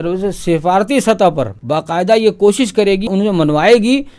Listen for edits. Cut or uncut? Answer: cut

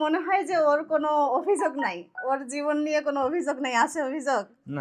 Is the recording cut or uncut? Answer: uncut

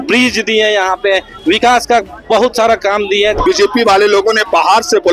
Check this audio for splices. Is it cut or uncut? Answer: cut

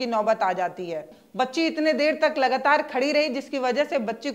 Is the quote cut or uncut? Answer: cut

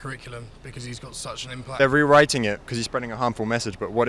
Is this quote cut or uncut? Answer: cut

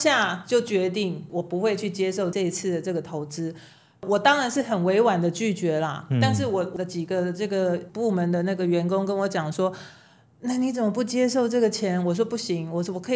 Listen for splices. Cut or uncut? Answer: uncut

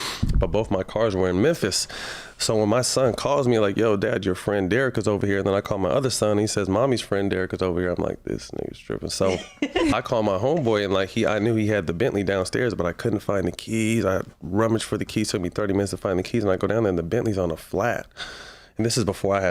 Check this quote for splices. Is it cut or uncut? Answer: cut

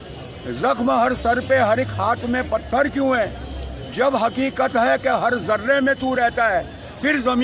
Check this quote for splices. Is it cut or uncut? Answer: uncut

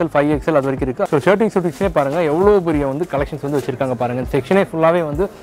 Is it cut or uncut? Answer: cut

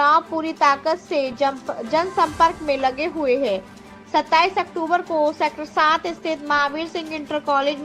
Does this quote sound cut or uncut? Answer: uncut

